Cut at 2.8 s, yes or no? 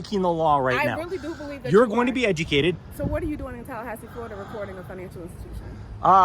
yes